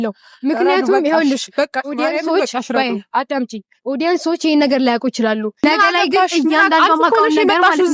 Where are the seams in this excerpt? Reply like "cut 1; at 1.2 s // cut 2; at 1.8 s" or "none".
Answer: cut 1; at 5.7 s